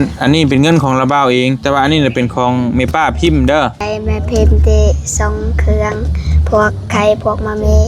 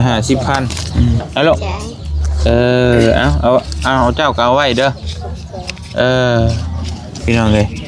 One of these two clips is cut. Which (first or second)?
first